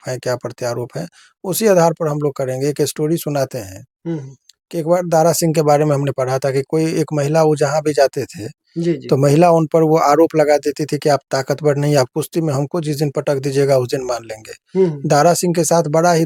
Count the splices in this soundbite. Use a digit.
0